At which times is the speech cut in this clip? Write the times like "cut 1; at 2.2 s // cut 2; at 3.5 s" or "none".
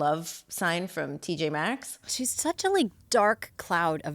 cut 1; at 2.0 s